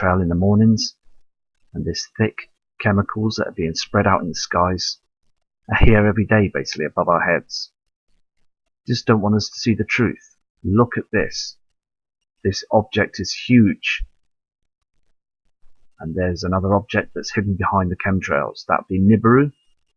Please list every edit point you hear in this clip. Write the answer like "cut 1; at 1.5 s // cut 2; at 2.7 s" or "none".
cut 1; at 9.1 s